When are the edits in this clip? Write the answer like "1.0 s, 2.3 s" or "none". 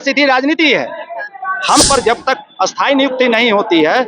1.8 s